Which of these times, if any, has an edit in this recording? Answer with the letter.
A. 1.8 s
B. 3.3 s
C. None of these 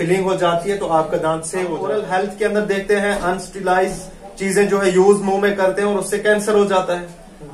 A